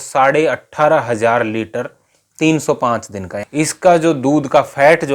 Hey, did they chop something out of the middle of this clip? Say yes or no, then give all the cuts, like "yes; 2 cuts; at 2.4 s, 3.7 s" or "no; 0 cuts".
yes; 1 cut; at 3.3 s